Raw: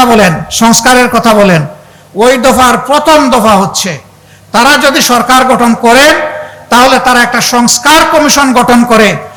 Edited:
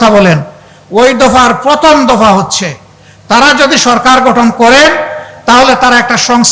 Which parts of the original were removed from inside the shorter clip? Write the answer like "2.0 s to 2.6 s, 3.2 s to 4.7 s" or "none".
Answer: none